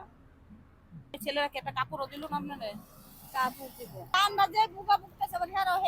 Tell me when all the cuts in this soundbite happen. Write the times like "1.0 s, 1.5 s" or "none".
1.2 s, 4.2 s